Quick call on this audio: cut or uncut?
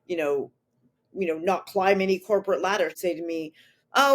cut